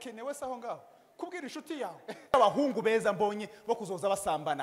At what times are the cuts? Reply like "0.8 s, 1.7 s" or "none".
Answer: 2.3 s